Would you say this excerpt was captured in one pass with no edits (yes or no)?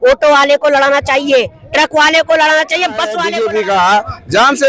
no